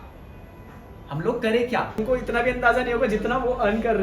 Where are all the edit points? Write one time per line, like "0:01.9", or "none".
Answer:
0:02.0